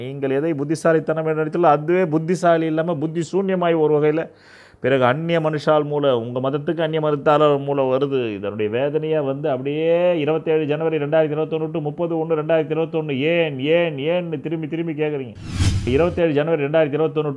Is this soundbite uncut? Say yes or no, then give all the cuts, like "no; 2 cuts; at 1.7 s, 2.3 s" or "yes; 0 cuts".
no; 1 cut; at 15.8 s